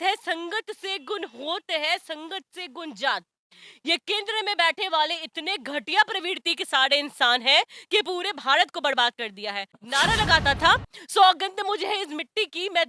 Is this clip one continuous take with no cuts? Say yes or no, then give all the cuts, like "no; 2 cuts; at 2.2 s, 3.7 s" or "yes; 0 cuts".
no; 1 cut; at 9.7 s